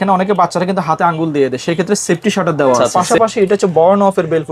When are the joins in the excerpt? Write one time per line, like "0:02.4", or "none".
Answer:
0:02.8